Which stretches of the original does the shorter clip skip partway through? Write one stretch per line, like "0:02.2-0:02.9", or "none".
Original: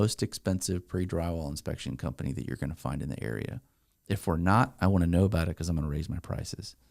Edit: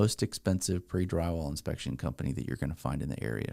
none